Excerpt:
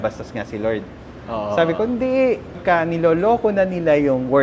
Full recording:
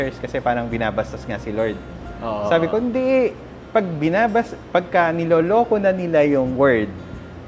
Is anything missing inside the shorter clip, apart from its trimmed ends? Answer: yes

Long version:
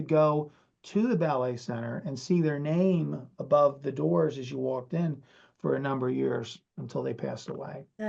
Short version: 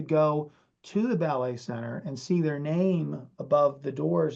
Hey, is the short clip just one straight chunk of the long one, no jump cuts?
yes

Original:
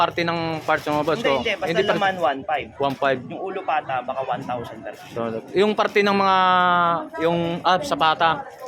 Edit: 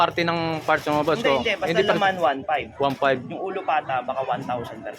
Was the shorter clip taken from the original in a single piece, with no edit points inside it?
yes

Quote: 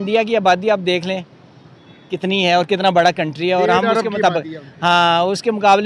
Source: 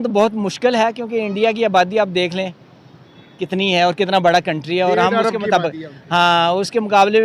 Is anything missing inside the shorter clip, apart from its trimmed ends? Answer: no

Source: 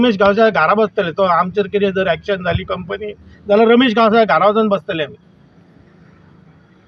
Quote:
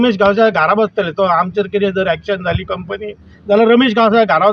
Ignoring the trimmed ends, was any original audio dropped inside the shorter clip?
no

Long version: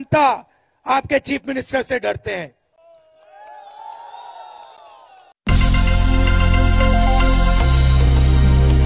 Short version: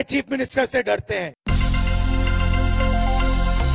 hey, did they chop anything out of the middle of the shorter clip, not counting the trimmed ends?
yes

